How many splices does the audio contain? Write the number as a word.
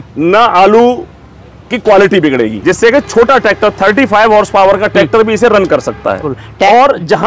two